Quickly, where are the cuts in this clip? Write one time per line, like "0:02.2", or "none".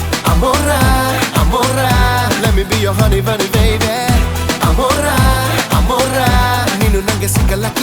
none